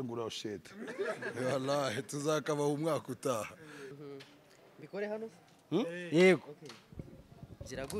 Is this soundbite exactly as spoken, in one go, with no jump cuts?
no; 1 cut; at 3.9 s

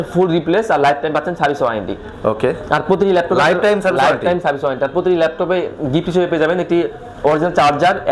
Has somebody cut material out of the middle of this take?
no; 0 cuts

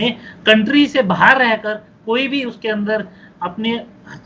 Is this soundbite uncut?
yes; 0 cuts

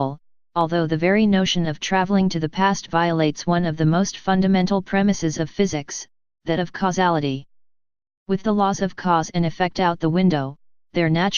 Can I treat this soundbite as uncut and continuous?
no; 1 cut; at 8.3 s

